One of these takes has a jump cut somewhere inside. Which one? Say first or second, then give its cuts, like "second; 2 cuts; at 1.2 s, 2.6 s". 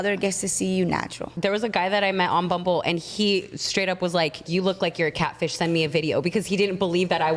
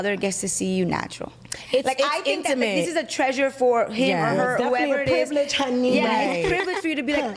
first; 2 cuts; at 1.3 s, 4.5 s